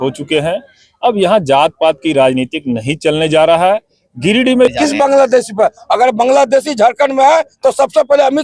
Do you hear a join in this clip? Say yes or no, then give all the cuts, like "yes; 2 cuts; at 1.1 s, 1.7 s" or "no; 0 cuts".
yes; 1 cut; at 4.7 s